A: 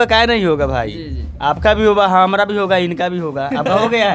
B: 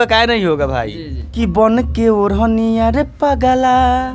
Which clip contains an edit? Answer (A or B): B